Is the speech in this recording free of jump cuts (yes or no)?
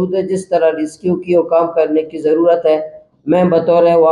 yes